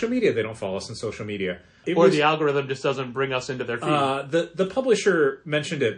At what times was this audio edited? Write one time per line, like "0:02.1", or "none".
0:01.7